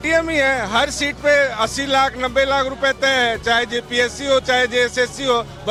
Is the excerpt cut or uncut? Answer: uncut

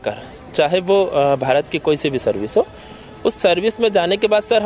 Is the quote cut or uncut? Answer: uncut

